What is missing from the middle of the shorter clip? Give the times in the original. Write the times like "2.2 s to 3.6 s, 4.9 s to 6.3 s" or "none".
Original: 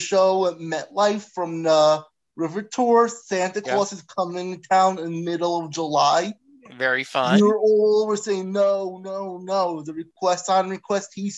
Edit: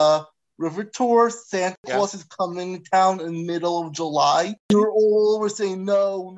6.5 s to 7.4 s